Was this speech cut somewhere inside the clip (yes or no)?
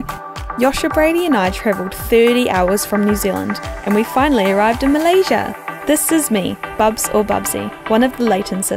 yes